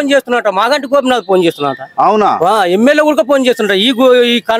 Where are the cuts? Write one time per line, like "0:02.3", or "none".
none